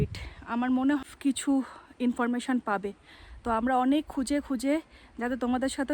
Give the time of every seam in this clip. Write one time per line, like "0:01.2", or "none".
0:01.0